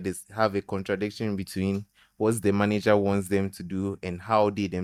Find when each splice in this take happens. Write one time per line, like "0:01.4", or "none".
none